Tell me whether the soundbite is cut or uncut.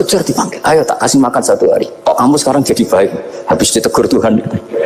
cut